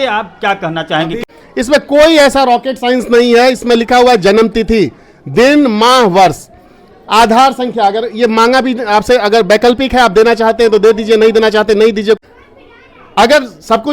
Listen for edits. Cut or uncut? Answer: cut